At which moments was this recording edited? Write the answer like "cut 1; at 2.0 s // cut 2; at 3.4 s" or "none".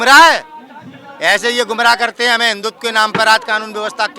none